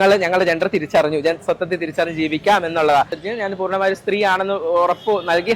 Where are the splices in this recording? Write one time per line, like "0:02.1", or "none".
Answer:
0:03.2